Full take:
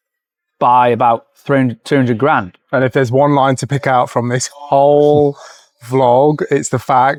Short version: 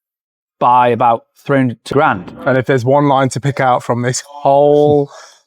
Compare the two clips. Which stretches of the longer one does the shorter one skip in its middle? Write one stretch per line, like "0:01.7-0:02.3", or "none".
0:01.9-0:02.2